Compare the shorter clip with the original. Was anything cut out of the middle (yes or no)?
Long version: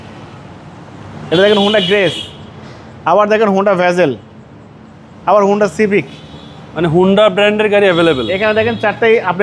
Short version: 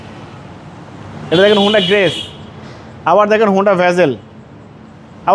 no